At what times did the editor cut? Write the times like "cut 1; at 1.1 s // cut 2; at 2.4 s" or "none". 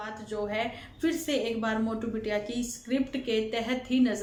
none